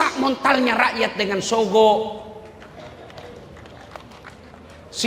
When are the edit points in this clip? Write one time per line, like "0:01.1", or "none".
none